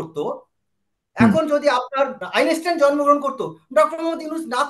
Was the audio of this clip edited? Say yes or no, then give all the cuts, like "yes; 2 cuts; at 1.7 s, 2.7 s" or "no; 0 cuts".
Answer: yes; 1 cut; at 2.2 s